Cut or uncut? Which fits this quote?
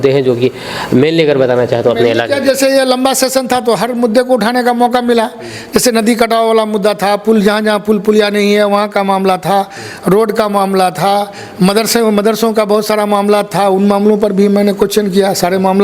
uncut